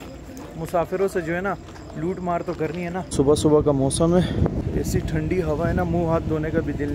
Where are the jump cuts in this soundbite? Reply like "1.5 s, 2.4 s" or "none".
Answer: 3.1 s, 4.6 s